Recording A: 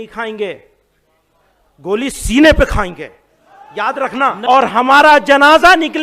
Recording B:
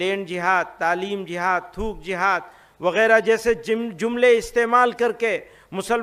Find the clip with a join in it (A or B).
A